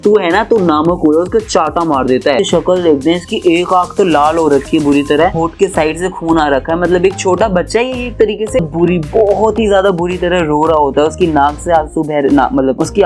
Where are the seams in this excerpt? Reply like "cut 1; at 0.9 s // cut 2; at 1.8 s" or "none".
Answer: cut 1; at 2.4 s // cut 2; at 8.6 s